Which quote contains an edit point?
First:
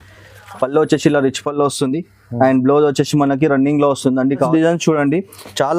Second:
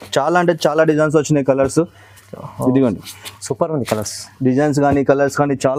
first; 1 cut; at 4.5 s

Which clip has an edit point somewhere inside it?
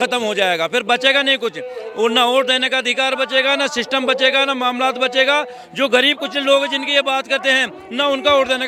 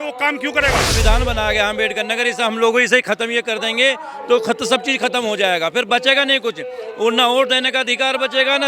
second; 1 cut; at 0.9 s

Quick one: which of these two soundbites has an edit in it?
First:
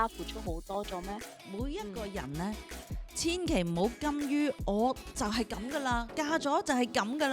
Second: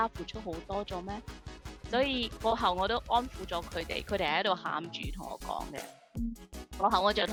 first; 1 cut; at 1.4 s

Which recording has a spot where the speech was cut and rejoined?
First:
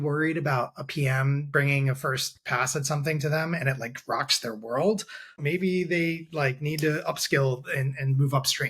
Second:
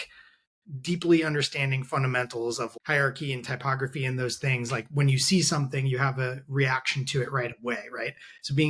first; 1 cut; at 5.4 s

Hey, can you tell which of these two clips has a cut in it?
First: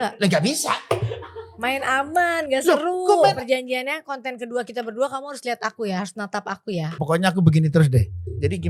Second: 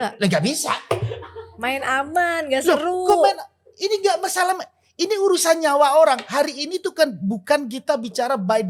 first; 2 cuts; at 3.4 s, 7.0 s

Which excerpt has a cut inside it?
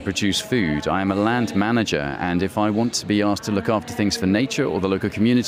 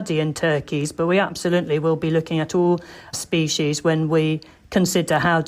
second; 1 cut; at 3.1 s

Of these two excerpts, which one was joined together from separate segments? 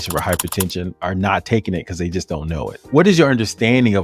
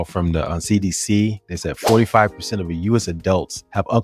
first; 2 cuts; at 0.9 s, 2.8 s

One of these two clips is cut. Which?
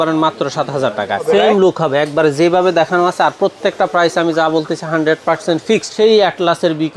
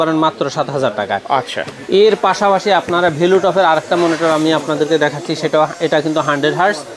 first; 2 cuts; at 1.2 s, 5.9 s

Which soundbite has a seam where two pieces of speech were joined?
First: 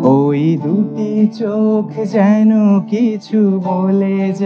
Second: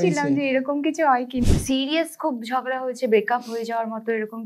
second; 1 cut; at 1.5 s

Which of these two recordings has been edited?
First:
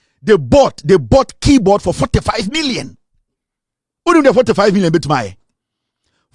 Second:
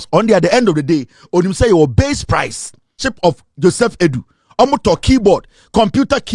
second; 1 cut; at 3.1 s

